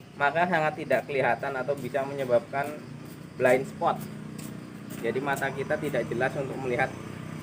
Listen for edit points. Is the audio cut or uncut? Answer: uncut